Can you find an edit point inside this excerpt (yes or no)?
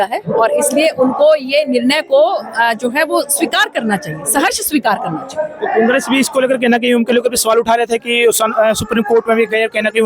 no